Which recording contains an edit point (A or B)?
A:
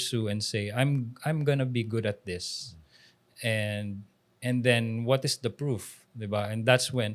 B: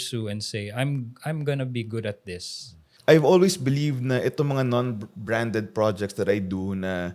B